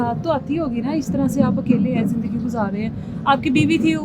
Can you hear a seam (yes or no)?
no